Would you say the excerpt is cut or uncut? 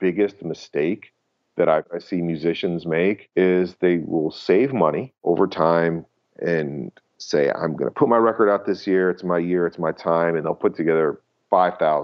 cut